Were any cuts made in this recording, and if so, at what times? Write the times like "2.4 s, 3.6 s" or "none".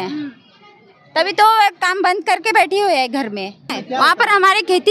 3.7 s